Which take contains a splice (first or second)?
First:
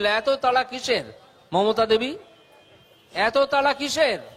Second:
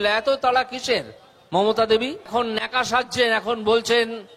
second